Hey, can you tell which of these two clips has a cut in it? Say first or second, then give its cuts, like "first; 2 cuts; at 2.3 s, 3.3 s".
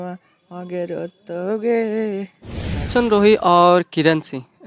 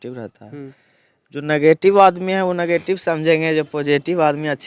first; 1 cut; at 2.9 s